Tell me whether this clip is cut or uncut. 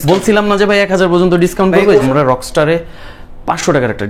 cut